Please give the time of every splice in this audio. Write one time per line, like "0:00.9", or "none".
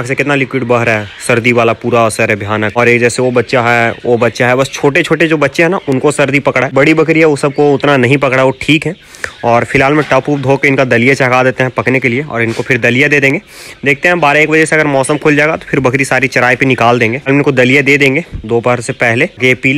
none